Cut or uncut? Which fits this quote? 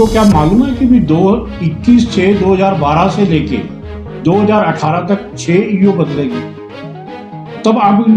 uncut